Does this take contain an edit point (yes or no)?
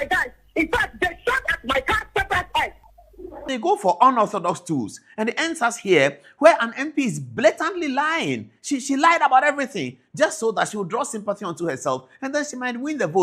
yes